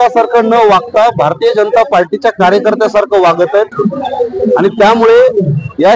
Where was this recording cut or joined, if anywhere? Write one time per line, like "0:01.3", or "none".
none